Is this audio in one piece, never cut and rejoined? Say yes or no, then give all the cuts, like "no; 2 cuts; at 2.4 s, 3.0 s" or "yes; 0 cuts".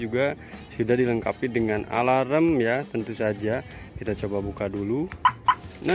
yes; 0 cuts